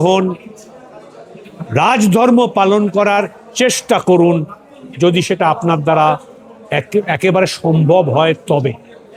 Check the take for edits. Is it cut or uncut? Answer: uncut